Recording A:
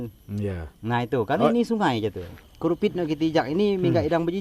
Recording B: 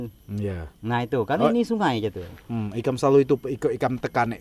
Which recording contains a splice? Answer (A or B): A